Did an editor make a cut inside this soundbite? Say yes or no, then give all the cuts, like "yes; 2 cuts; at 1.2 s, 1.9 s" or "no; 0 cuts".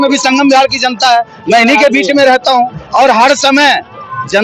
no; 0 cuts